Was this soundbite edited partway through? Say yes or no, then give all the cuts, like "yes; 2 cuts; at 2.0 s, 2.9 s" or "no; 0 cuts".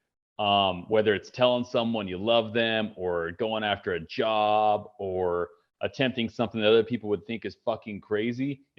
no; 0 cuts